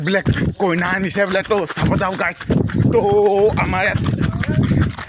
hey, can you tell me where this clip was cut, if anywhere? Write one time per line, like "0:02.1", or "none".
0:02.8